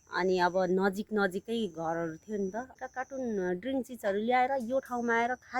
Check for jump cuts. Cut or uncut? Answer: cut